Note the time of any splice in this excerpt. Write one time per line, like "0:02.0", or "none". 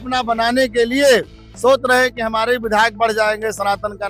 none